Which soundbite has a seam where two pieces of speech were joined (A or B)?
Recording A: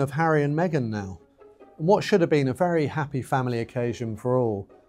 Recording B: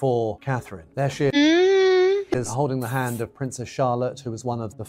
B